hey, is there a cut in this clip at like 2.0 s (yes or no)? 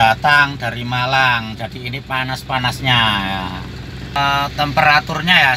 no